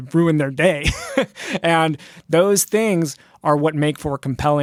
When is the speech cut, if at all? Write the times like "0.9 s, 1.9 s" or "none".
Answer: none